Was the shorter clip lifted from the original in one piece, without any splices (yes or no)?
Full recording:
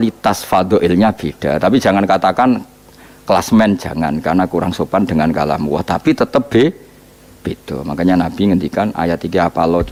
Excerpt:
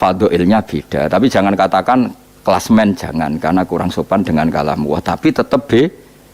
no